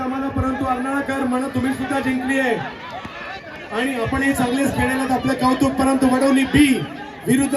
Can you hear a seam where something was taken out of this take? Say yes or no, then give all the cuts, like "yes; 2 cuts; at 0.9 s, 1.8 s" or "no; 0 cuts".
no; 0 cuts